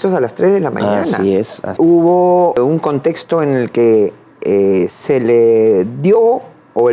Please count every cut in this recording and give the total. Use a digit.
2